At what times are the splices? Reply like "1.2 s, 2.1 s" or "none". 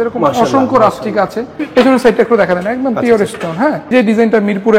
1.6 s, 3.9 s